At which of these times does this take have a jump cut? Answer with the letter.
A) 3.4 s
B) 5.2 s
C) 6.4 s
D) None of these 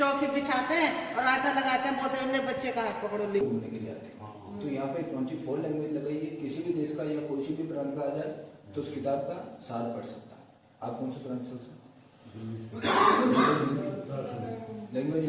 A